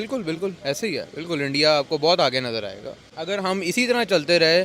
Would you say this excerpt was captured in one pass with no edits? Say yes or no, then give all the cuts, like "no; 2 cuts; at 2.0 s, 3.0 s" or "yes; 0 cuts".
no; 1 cut; at 3.1 s